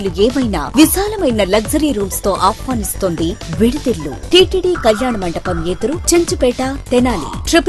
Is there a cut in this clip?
yes; 1 cut; at 4.2 s

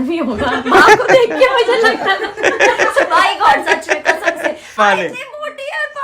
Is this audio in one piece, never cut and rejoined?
no; 1 cut; at 4.8 s

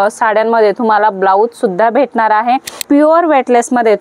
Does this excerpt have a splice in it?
yes; 1 cut; at 2.7 s

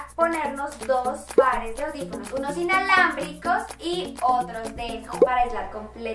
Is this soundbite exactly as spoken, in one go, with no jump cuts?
yes; 0 cuts

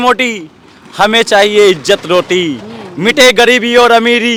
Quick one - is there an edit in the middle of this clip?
no; 0 cuts

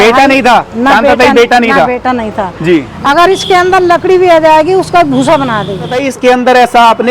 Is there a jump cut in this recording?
yes; 2 cuts; at 2.9 s, 6.0 s

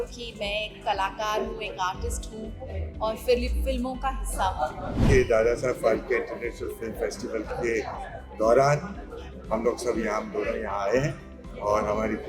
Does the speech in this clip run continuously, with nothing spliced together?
no; 1 cut; at 5.0 s

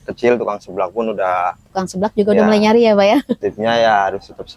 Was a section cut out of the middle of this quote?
yes; 1 cut; at 3.4 s

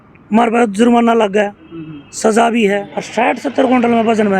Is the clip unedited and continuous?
no; 1 cut; at 3.0 s

